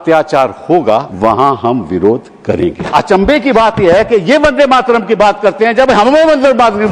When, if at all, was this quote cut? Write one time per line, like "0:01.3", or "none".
0:01.1
0:02.9